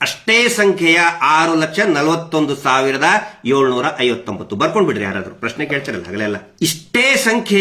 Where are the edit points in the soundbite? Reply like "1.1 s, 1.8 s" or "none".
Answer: 6.5 s